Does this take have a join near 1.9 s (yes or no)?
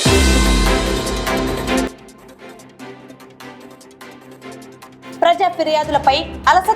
yes